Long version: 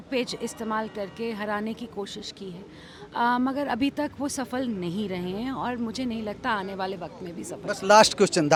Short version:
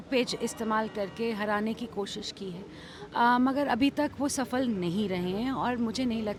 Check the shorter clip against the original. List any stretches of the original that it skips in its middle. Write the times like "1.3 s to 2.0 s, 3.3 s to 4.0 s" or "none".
none

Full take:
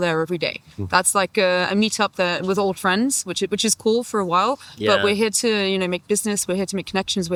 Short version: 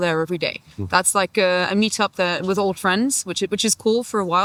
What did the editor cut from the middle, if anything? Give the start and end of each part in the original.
none

